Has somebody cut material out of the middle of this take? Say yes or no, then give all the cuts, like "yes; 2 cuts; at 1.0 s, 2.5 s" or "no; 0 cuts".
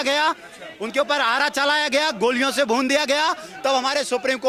no; 0 cuts